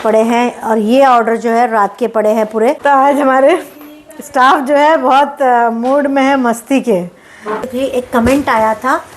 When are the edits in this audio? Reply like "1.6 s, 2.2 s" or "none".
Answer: 2.8 s, 7.7 s